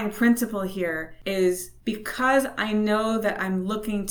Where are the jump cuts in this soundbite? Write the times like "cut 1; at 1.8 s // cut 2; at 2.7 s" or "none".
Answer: cut 1; at 1.1 s // cut 2; at 1.7 s